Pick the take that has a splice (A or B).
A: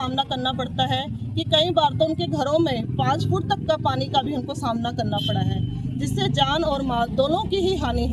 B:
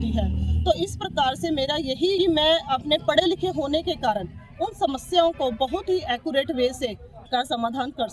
B